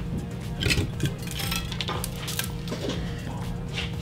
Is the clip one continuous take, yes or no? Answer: yes